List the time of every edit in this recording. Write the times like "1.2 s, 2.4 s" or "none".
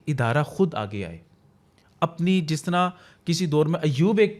none